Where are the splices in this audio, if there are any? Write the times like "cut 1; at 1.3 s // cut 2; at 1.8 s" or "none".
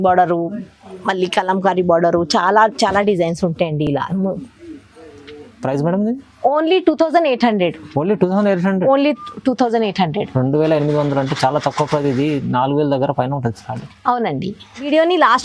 none